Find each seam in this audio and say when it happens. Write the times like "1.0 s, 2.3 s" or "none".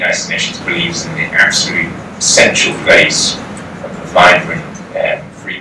none